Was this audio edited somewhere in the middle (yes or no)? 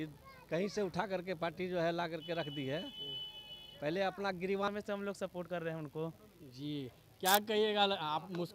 yes